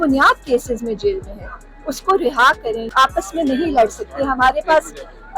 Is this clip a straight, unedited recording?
no; 1 cut; at 2.9 s

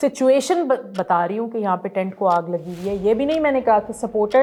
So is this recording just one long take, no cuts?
yes; 0 cuts

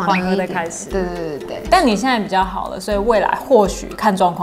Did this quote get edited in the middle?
yes; 1 cut; at 1.6 s

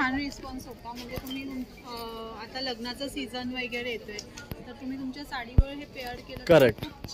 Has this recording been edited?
no; 0 cuts

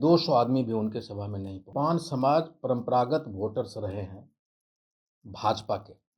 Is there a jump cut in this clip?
yes; 1 cut; at 1.7 s

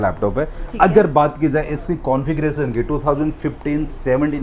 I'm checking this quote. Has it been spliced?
no; 0 cuts

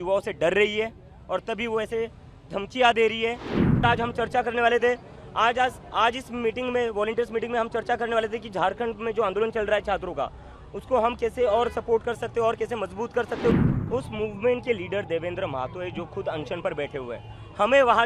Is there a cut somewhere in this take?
yes; 2 cuts; at 3.8 s, 13.6 s

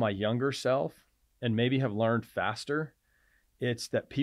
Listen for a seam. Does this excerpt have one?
no; 0 cuts

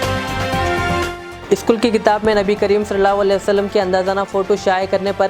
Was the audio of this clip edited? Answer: no; 0 cuts

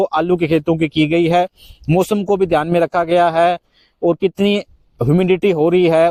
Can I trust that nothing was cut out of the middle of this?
yes; 0 cuts

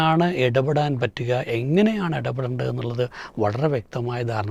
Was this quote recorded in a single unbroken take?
yes; 0 cuts

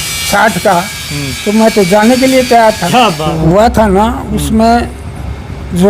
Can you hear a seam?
yes; 1 cut; at 3.3 s

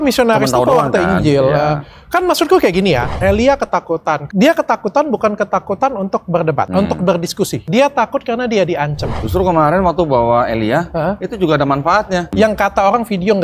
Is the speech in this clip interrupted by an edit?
yes; 6 cuts; at 3.1 s, 4.2 s, 6.7 s, 7.6 s, 9.1 s, 12.3 s

